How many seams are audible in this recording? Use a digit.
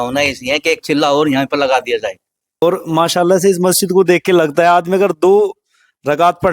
1